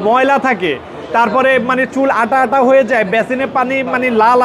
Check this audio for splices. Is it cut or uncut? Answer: uncut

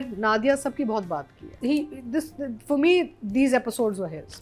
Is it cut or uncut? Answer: cut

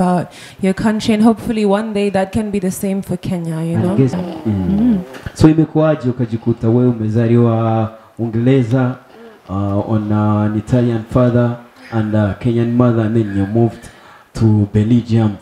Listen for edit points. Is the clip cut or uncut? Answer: cut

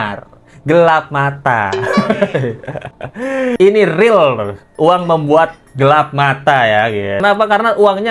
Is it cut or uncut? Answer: cut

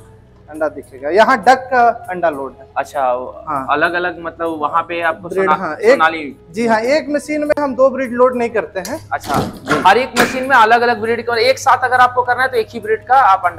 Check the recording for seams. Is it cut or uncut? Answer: uncut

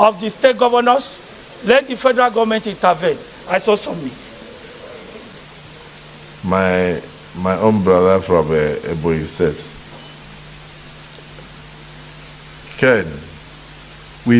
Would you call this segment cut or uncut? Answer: uncut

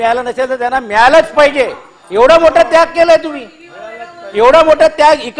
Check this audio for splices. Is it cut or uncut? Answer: uncut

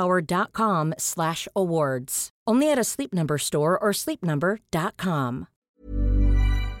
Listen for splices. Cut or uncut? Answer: cut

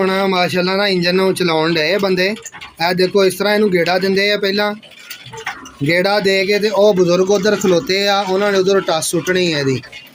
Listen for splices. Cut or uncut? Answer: uncut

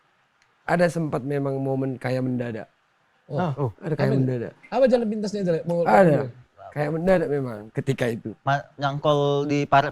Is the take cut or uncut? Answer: uncut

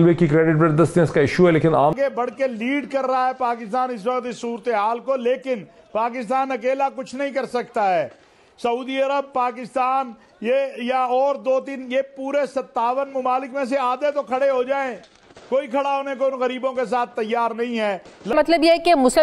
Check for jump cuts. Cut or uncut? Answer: cut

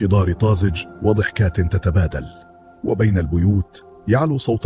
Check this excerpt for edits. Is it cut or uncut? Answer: uncut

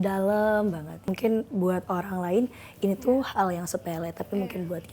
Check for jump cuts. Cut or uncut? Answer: cut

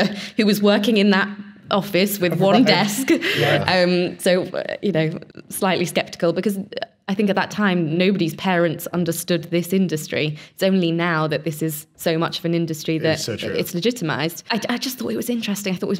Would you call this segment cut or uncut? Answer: cut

